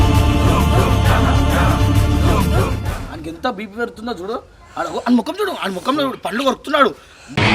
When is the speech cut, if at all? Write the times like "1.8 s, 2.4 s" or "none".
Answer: 2.8 s